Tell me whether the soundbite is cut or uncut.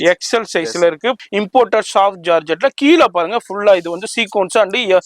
cut